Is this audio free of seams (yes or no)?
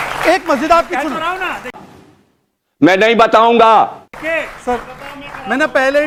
yes